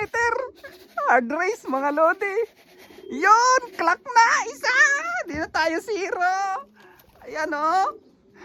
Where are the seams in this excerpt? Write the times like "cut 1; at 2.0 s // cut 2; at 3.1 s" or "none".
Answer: none

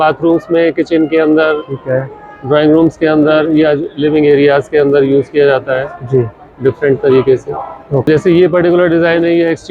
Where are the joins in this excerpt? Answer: cut 1; at 8.1 s

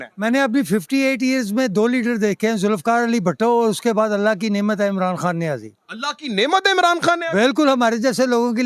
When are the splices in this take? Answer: none

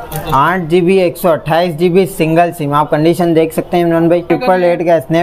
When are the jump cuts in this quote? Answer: cut 1; at 4.3 s

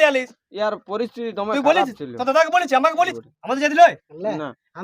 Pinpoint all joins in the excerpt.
cut 1; at 3.3 s

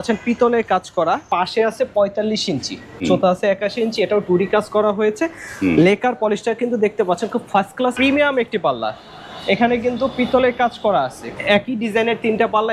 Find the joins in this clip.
cut 1; at 1.3 s // cut 2; at 3.0 s // cut 3; at 7.9 s // cut 4; at 11.2 s

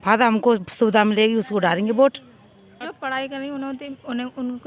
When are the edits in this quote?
cut 1; at 2.8 s

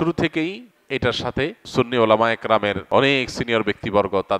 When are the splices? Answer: cut 1; at 1.6 s // cut 2; at 2.8 s

